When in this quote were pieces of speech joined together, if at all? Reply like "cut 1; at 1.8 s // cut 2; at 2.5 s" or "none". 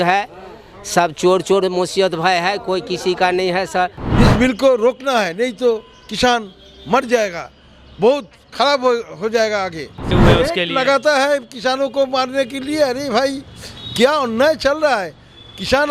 cut 1; at 4.0 s // cut 2; at 10.1 s